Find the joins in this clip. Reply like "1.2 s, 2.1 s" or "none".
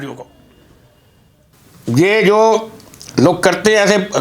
1.6 s